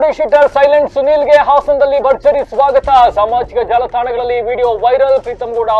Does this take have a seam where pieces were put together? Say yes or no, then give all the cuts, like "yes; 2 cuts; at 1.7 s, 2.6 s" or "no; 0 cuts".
no; 0 cuts